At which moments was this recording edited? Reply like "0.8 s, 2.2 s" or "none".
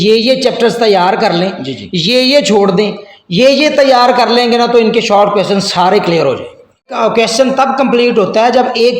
6.9 s